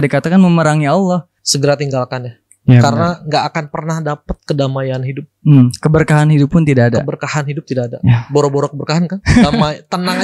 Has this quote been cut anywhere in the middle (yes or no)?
yes